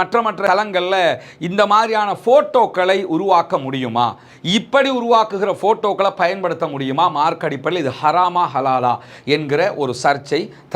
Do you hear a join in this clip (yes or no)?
no